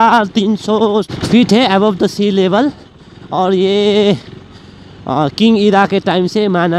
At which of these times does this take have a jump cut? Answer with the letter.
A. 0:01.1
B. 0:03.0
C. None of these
A